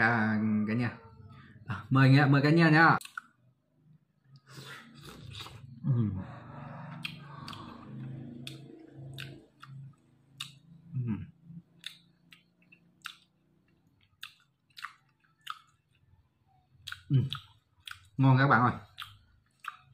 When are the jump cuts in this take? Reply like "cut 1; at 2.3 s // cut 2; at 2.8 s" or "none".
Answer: cut 1; at 3.0 s